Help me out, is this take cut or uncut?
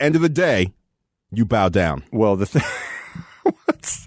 cut